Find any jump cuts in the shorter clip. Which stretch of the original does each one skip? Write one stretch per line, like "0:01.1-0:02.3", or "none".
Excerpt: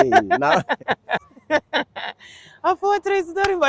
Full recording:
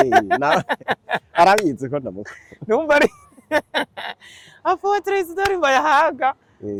0:01.2-0:03.2